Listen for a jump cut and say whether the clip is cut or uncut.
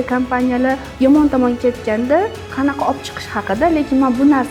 uncut